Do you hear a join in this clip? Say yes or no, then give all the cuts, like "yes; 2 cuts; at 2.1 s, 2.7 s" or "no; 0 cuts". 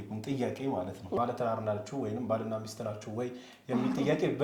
yes; 1 cut; at 1.2 s